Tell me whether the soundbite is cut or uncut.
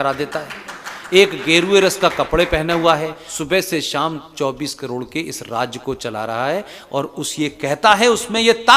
cut